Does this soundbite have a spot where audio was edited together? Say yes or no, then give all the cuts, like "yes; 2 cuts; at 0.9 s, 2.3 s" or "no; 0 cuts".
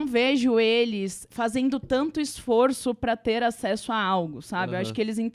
yes; 1 cut; at 1.2 s